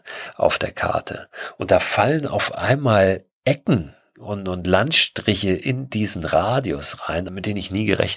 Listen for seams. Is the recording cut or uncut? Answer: cut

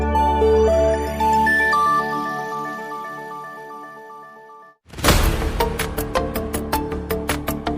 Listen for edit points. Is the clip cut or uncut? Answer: cut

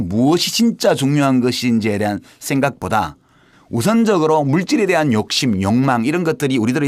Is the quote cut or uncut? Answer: cut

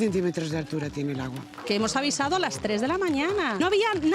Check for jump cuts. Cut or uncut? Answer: cut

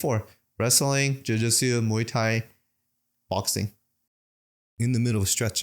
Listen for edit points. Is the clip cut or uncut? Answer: cut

